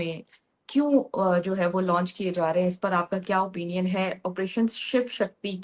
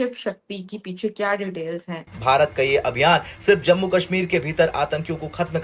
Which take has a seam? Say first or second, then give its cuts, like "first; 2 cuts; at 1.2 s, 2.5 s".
second; 1 cut; at 2.0 s